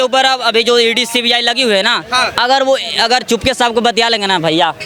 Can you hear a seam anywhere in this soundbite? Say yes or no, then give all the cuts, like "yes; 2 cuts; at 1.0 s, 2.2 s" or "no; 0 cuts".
no; 0 cuts